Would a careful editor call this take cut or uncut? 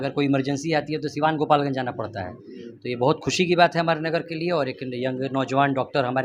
uncut